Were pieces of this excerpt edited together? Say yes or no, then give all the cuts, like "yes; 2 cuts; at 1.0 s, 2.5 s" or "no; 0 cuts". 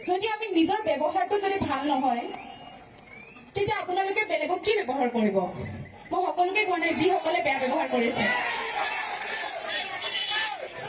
no; 0 cuts